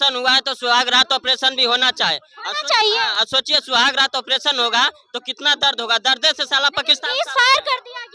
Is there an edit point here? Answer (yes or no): no